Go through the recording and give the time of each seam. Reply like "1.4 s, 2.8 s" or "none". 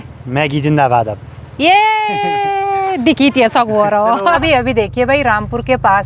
4.4 s